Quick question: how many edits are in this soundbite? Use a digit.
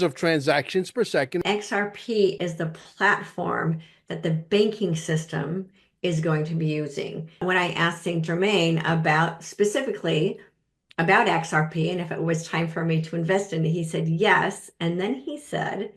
2